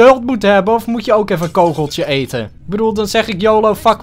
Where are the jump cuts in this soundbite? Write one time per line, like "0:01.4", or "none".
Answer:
0:02.5

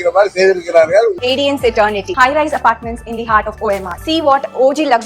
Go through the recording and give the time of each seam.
0:01.2

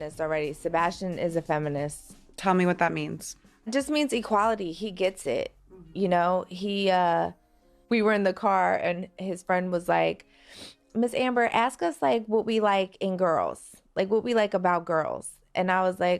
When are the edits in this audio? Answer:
0:10.0

